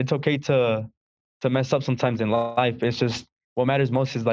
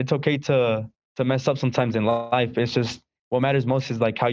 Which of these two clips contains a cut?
second; 1 cut; at 1.0 s

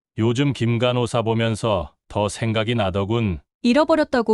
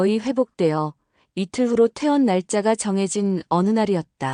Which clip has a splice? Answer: first; 1 cut; at 3.5 s

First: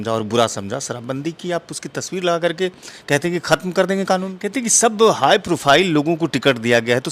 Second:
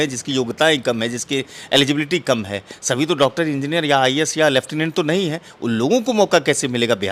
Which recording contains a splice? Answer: first; 1 cut; at 4.4 s

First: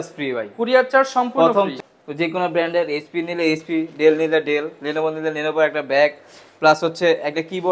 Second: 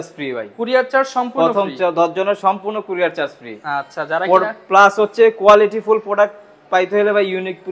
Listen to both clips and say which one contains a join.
first; 1 cut; at 1.7 s

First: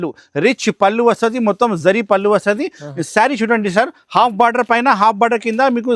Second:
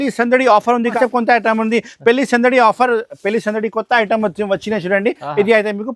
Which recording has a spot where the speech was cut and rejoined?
second; 1 cut; at 0.9 s

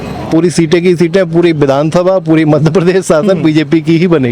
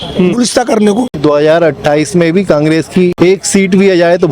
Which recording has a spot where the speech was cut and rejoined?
second; 2 cuts; at 1.1 s, 3.1 s

